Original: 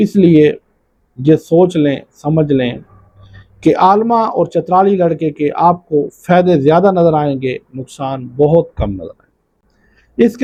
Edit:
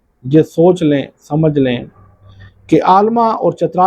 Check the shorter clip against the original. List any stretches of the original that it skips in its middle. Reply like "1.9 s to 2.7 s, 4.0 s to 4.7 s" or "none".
none